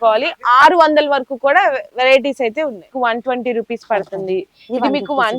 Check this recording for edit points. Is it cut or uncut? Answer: cut